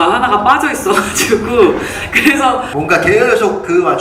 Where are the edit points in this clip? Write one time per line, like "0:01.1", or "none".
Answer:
0:02.7